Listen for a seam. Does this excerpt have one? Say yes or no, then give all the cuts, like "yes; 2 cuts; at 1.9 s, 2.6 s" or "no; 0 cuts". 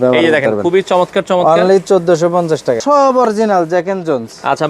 yes; 1 cut; at 2.8 s